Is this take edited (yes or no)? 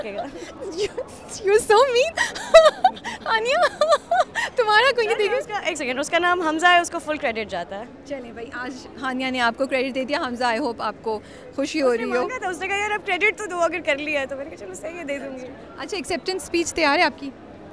no